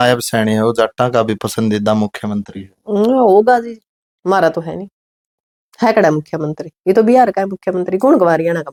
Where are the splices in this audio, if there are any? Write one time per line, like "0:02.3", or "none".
none